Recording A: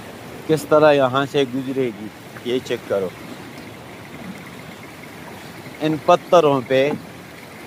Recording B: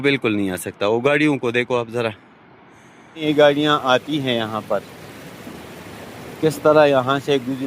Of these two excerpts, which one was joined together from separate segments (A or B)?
B